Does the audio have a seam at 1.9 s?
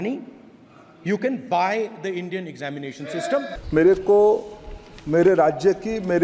no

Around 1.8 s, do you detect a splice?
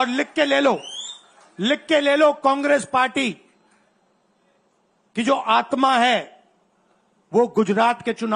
no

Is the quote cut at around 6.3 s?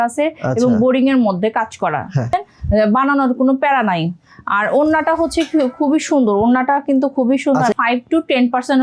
no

